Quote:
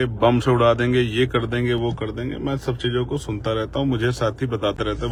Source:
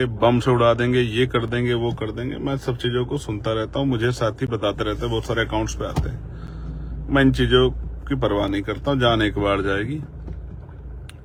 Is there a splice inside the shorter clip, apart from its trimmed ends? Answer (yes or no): no